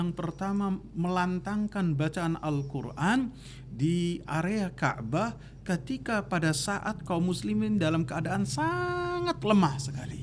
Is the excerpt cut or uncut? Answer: uncut